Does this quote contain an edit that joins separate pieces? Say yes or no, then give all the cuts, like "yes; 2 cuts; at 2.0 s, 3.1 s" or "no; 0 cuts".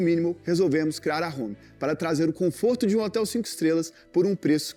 no; 0 cuts